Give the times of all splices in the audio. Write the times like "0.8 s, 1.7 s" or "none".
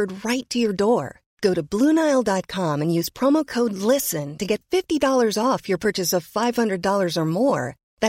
none